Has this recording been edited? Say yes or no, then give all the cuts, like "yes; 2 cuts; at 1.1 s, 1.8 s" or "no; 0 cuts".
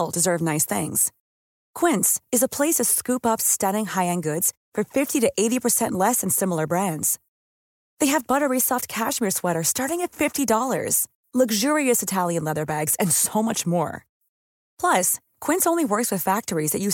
no; 0 cuts